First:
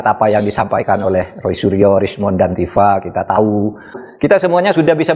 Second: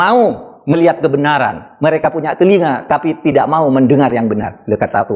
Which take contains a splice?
first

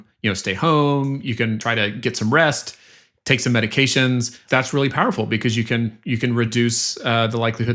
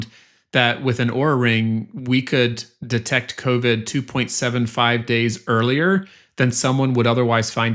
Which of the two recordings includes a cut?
first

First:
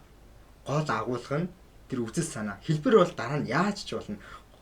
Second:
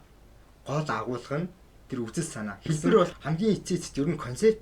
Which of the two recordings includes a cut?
second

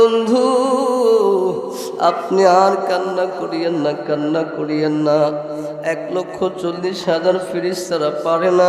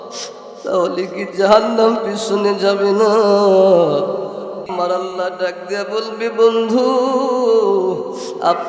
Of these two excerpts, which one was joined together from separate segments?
second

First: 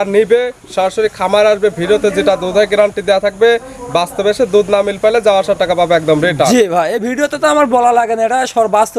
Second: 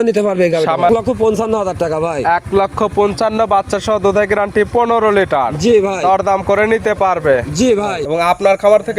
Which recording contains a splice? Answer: second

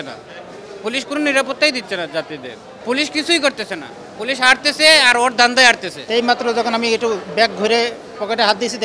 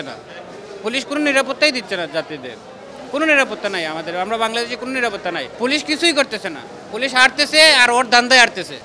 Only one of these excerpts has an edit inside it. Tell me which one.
first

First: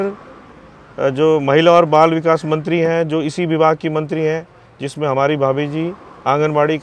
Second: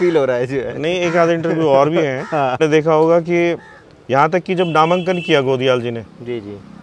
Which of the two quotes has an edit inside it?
second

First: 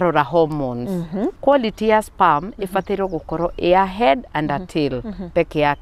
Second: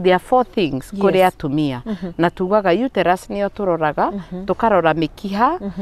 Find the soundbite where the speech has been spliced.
first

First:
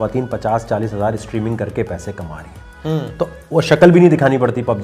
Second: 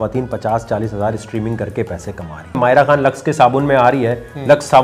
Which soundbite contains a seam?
second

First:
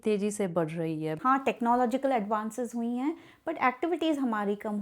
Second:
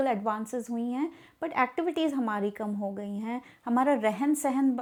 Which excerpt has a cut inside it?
first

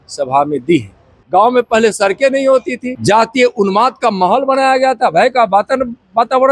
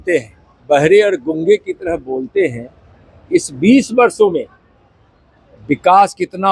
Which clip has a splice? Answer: first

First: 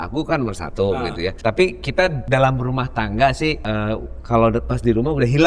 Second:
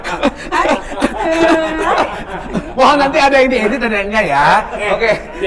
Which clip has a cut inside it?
first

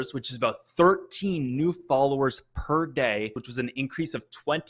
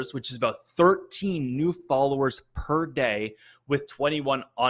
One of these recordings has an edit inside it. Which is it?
first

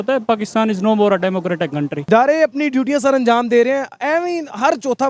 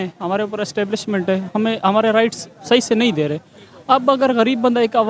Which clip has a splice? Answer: first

